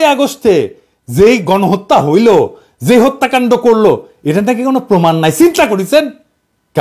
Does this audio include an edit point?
no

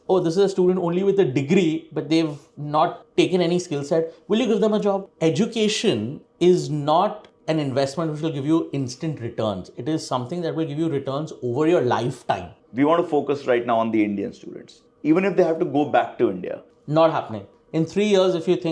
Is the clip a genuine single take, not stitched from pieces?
no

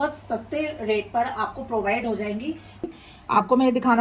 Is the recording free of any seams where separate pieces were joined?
no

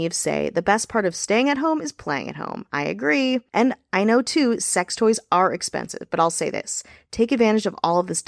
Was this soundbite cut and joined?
no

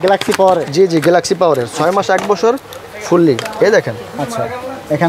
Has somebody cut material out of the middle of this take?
no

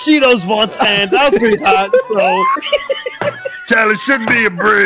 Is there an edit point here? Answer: no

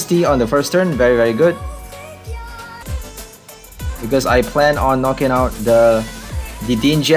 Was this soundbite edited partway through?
yes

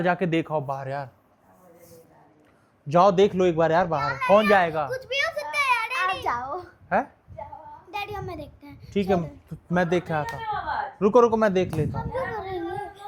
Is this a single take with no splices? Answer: yes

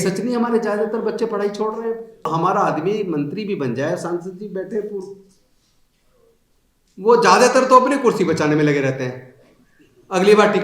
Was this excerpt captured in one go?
no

